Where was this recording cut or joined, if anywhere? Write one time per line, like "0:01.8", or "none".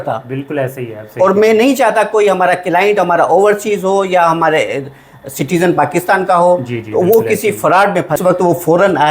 0:08.2